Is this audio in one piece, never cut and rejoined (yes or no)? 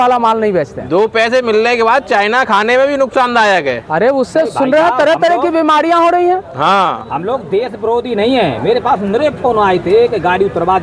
yes